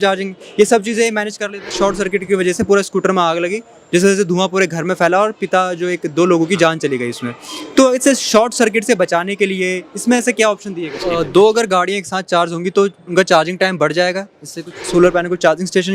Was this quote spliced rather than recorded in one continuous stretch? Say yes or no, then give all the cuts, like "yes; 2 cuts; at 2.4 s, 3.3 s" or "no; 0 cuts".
yes; 3 cuts; at 1.7 s, 11.0 s, 14.8 s